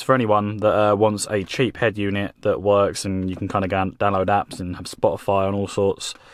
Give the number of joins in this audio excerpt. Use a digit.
0